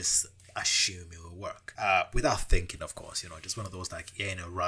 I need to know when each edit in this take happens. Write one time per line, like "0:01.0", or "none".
0:01.7